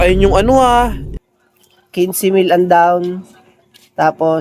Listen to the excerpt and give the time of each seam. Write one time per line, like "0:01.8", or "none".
0:01.0